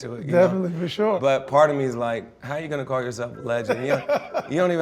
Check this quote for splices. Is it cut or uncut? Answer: cut